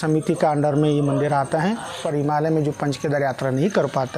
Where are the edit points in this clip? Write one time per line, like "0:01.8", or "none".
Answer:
0:02.0